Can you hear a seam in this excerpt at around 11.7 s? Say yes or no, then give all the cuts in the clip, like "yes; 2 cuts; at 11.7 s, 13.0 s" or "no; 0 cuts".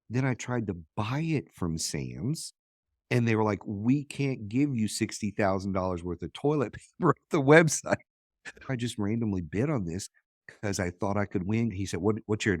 yes; 2 cuts; at 8.6 s, 11.7 s